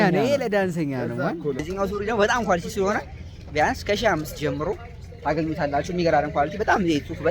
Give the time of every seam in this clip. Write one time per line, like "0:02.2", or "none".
0:01.7